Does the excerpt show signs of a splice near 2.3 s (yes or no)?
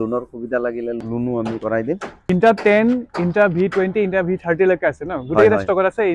yes